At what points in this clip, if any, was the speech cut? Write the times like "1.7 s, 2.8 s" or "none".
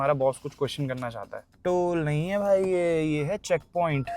1.5 s